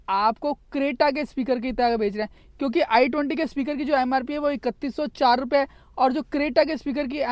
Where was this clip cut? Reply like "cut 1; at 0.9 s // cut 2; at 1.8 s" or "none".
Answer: none